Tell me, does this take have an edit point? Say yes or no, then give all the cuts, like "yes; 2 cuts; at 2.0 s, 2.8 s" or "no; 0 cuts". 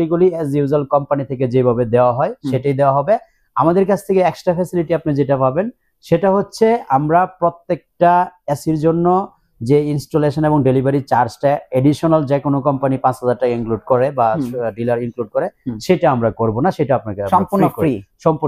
no; 0 cuts